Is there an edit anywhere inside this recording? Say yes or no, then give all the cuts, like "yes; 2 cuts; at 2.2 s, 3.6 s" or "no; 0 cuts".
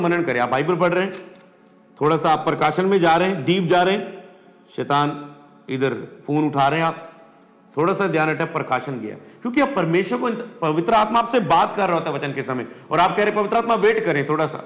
no; 0 cuts